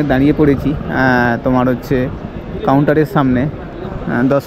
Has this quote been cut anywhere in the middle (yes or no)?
no